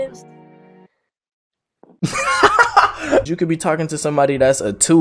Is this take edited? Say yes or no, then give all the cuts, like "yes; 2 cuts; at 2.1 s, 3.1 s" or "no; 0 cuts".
yes; 1 cut; at 3.3 s